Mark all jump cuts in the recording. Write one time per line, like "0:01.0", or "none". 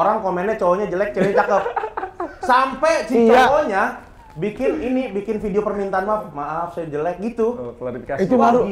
none